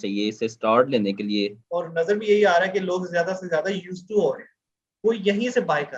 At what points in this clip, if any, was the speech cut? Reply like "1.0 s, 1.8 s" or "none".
1.6 s